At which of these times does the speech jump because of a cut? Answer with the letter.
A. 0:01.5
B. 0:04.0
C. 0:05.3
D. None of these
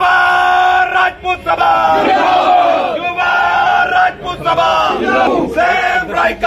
C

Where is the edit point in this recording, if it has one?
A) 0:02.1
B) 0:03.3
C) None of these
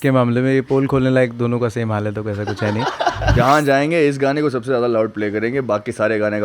B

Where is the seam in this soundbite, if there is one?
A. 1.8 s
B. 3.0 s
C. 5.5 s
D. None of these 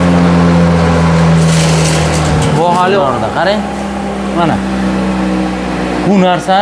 B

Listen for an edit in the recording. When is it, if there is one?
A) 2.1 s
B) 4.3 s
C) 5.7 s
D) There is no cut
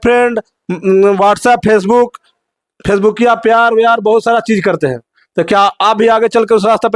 D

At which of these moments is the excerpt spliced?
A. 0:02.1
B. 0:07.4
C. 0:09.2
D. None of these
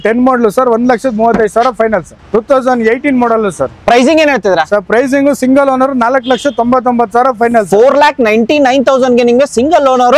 A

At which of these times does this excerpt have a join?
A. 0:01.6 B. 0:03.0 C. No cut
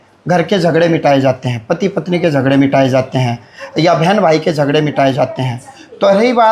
C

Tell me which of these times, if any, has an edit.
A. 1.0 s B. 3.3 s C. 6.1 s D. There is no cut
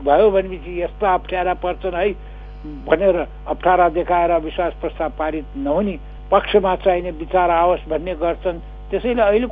C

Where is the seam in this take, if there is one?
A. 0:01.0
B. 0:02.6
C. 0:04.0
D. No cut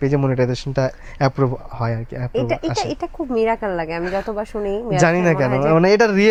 D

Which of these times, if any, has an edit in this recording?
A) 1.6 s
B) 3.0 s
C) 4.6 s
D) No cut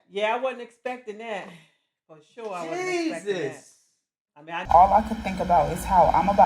C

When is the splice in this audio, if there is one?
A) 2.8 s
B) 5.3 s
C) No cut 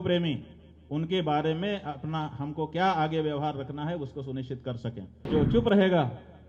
B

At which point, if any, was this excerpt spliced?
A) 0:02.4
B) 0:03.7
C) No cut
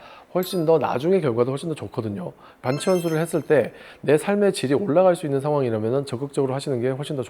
C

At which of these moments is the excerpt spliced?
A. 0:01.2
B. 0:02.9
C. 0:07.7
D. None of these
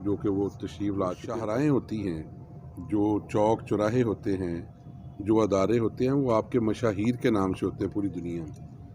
A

